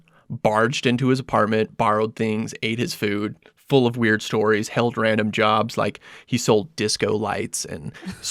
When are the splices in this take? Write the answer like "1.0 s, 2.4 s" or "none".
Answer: none